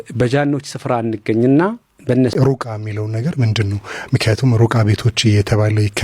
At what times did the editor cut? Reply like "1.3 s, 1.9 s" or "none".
2.3 s